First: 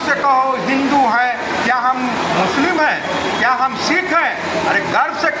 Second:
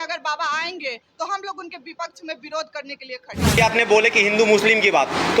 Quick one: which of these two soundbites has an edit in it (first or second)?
second